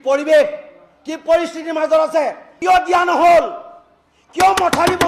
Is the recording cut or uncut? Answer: cut